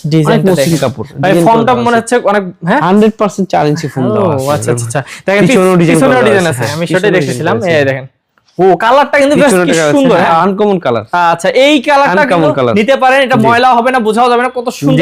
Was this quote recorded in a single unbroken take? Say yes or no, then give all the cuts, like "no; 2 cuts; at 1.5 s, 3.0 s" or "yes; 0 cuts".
yes; 0 cuts